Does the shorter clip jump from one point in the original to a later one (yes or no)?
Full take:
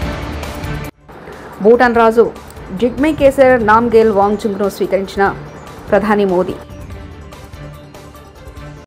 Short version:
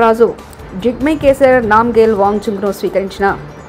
no